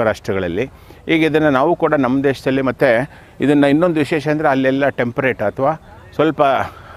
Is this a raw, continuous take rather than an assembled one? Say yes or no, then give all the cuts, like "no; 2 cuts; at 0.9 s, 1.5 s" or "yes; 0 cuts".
yes; 0 cuts